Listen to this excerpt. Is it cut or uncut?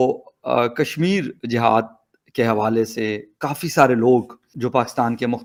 uncut